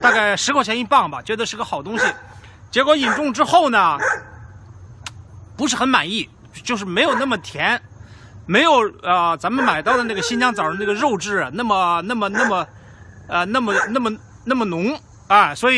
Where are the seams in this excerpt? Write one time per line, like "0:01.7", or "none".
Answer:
0:13.1